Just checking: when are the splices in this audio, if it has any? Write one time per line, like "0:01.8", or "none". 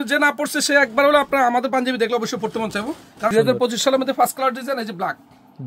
0:03.3